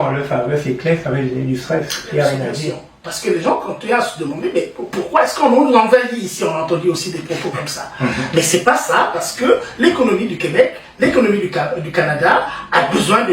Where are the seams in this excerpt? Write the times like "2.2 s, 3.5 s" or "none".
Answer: 2.7 s